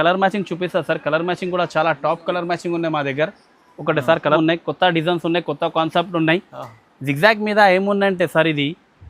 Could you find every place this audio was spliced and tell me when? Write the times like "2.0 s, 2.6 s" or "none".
4.4 s

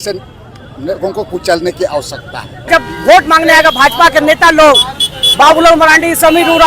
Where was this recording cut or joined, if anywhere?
2.7 s

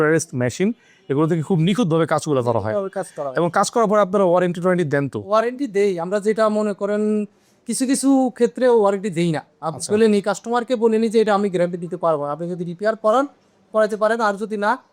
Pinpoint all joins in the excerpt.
none

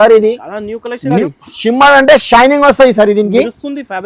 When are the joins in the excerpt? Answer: 1.2 s

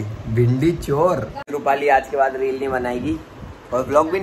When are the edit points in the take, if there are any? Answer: 1.4 s

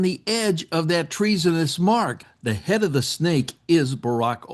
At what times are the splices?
2.3 s

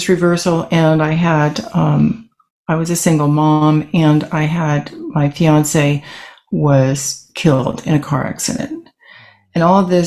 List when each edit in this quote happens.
none

